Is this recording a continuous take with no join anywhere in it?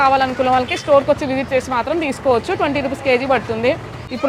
yes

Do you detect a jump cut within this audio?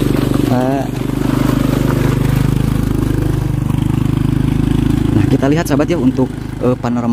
no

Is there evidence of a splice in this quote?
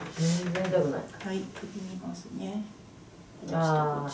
no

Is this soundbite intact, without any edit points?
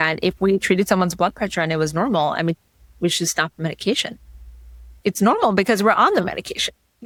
yes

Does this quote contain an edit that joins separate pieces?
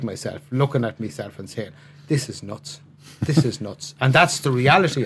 no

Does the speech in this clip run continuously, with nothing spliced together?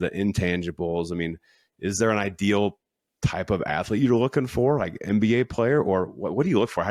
yes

